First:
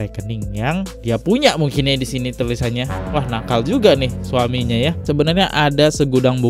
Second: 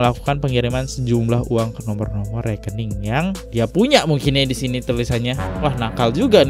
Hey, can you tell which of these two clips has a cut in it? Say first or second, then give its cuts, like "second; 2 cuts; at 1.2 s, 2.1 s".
first; 1 cut; at 5.1 s